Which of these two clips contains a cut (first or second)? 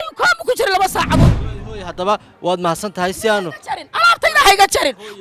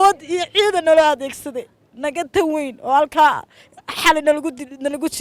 first